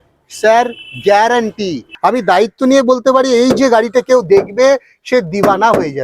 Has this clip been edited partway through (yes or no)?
yes